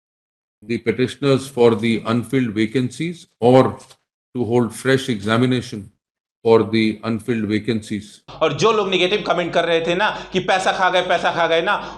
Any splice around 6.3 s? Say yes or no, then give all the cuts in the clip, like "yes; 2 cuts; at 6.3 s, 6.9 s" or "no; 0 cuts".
no; 1 cut; at 8.3 s